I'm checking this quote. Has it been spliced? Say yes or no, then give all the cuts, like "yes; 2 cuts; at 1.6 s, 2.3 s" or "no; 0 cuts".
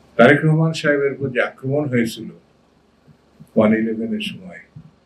no; 0 cuts